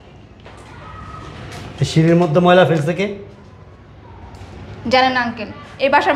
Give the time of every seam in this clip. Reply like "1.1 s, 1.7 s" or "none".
none